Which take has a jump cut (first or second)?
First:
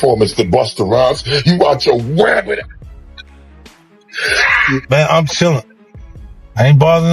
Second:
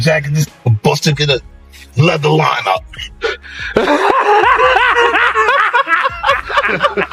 first